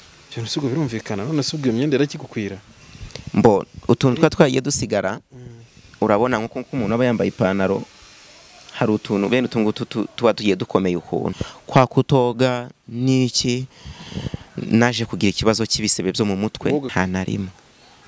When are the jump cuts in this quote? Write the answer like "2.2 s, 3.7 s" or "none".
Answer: 11.3 s, 16.9 s